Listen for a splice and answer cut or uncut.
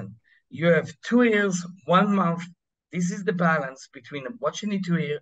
uncut